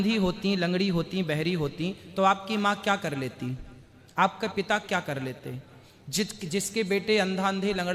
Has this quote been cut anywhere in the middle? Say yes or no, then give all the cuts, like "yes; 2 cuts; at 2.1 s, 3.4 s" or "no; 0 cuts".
no; 0 cuts